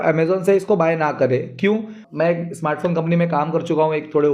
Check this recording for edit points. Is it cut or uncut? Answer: cut